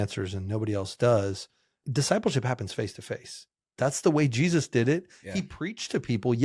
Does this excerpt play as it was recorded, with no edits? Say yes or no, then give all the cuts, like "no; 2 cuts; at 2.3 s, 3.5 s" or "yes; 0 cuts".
no; 2 cuts; at 1.8 s, 3.6 s